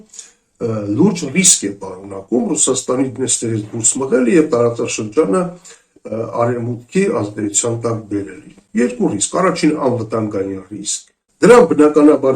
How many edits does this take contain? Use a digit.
1